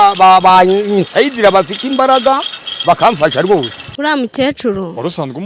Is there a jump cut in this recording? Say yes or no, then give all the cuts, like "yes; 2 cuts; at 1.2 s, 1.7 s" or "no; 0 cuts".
yes; 1 cut; at 3.8 s